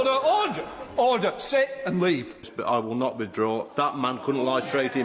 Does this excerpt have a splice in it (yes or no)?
yes